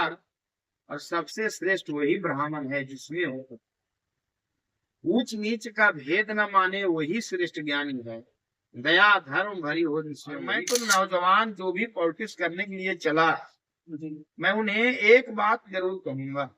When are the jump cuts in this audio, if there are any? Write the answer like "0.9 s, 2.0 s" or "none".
10.6 s